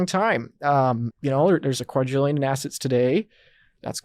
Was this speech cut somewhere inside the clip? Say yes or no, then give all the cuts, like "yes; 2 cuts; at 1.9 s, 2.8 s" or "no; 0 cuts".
yes; 1 cut; at 1.1 s